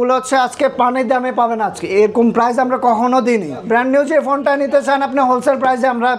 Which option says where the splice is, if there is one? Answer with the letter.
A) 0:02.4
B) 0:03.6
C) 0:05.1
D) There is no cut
B